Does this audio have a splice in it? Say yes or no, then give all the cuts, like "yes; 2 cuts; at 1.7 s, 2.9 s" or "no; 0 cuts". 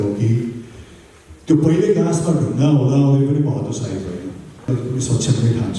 yes; 1 cut; at 4.7 s